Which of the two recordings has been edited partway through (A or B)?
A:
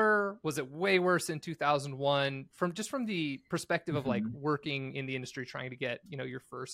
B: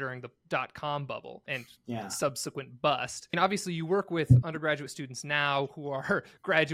B